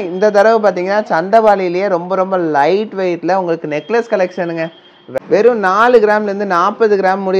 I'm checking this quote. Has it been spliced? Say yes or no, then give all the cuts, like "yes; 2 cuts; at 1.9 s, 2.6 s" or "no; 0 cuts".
yes; 1 cut; at 5.2 s